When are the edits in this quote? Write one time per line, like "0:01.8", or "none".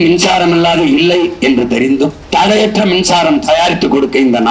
0:02.2